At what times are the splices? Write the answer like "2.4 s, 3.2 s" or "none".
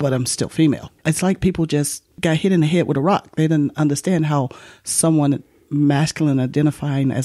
0.9 s, 2.0 s